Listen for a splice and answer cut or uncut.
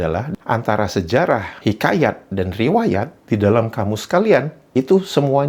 uncut